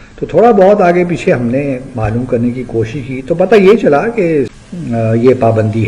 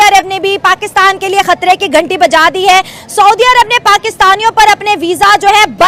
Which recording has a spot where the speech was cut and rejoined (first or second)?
first